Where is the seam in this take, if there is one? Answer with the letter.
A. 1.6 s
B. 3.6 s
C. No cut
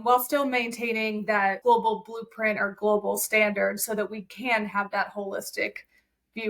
A